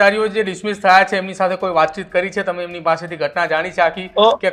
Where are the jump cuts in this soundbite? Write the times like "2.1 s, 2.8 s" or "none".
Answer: none